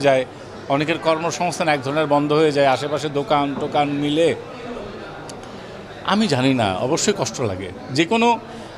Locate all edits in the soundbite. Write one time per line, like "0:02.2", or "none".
none